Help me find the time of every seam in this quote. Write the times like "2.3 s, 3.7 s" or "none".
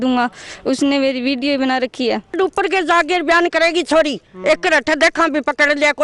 2.3 s